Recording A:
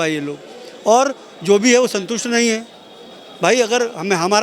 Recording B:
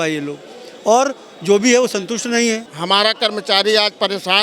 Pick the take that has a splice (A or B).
B